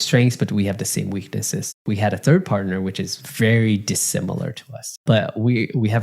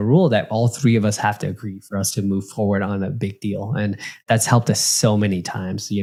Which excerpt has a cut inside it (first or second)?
first